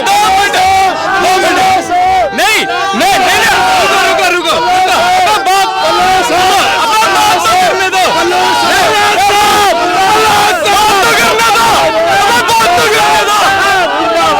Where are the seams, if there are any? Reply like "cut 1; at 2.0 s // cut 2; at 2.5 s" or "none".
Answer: none